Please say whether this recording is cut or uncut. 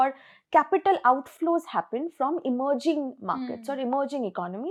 uncut